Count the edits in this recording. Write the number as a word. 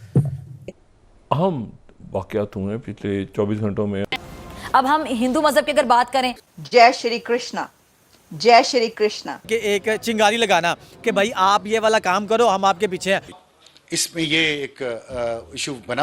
two